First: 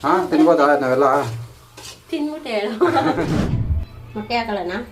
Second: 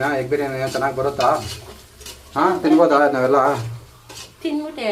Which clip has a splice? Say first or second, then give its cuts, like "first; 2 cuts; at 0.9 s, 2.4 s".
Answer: first; 1 cut; at 3.6 s